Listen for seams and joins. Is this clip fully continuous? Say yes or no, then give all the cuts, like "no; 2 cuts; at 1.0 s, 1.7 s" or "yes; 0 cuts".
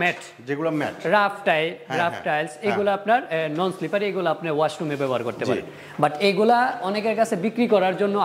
yes; 0 cuts